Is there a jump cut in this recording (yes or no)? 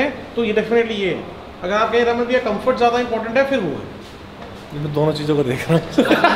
no